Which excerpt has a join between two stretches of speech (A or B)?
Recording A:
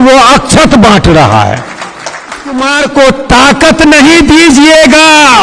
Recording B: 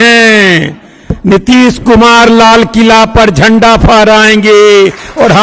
A